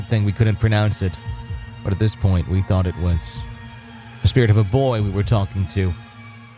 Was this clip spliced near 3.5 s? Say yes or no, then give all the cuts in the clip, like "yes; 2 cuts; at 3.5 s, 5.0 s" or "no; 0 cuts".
no; 0 cuts